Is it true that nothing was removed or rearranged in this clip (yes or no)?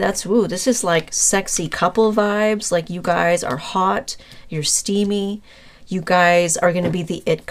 yes